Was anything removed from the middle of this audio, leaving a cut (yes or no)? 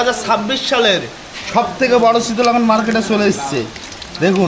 no